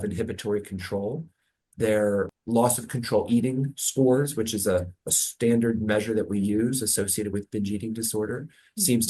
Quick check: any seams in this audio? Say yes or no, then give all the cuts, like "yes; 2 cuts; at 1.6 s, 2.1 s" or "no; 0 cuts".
yes; 1 cut; at 2.3 s